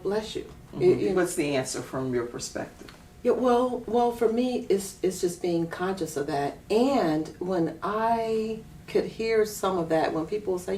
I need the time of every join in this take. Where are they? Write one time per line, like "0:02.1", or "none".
0:01.1

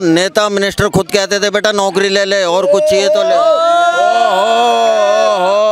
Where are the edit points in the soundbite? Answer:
none

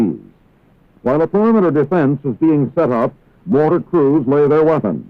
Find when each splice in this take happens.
0:01.3

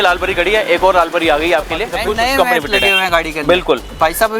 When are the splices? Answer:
0:01.9

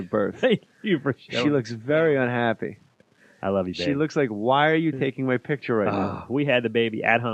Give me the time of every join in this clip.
0:05.5

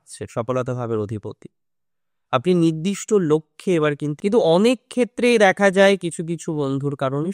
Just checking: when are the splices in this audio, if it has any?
0:04.1

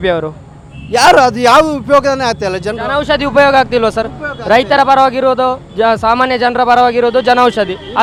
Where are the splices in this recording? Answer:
none

